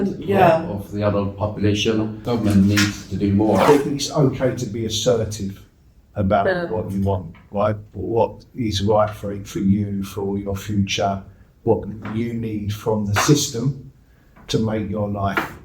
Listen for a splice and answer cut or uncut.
cut